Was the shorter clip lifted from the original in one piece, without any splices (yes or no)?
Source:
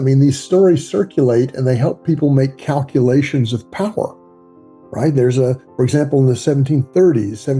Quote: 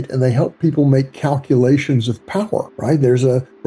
no